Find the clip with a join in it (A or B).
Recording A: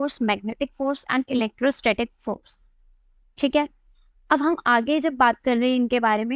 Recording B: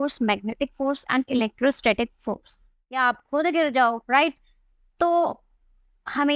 B